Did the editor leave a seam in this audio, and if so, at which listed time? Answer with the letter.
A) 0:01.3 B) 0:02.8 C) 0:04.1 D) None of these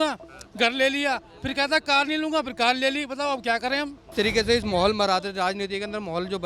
C